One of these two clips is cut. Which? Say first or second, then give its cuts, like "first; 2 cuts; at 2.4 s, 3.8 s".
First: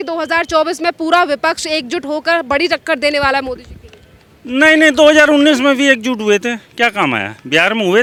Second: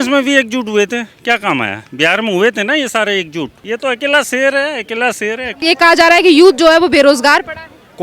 second; 2 cuts; at 3.6 s, 5.6 s